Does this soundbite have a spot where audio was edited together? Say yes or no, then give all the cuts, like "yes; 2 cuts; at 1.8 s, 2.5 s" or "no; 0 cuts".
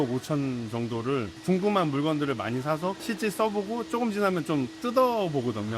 no; 0 cuts